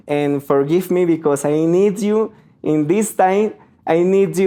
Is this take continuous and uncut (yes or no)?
yes